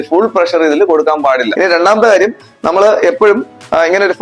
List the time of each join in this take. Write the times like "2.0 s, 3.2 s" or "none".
1.5 s